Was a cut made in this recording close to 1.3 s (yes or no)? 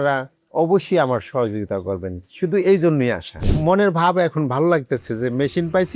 no